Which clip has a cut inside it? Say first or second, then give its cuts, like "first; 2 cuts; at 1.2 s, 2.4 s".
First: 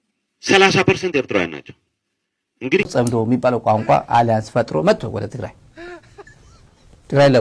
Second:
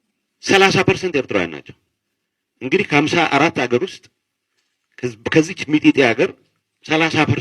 first; 1 cut; at 2.9 s